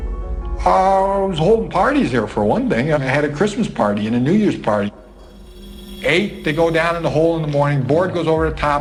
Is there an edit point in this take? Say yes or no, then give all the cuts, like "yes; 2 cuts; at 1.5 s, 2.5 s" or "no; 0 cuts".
no; 0 cuts